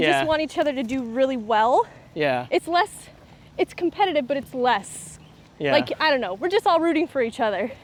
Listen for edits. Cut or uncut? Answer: uncut